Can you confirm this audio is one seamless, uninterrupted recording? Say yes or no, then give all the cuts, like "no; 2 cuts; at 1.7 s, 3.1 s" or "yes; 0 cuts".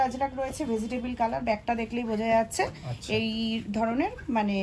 yes; 0 cuts